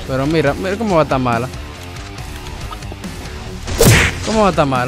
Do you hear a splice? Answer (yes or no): yes